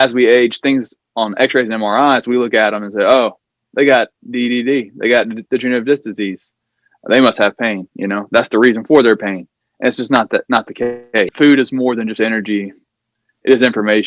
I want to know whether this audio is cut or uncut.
cut